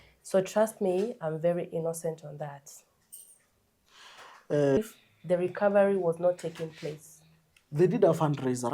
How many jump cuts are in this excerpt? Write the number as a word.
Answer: one